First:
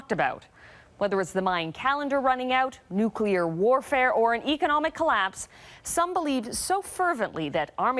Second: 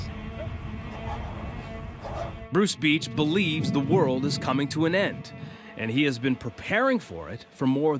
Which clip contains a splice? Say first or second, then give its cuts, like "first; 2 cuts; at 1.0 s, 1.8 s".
first; 1 cut; at 6.1 s